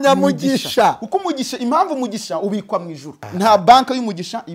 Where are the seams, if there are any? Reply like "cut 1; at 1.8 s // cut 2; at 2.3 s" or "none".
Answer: cut 1; at 3.1 s